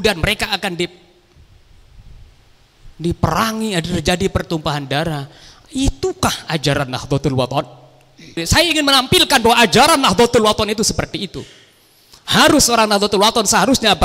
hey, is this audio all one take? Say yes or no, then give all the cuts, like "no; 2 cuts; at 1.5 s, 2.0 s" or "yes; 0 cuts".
no; 1 cut; at 8.4 s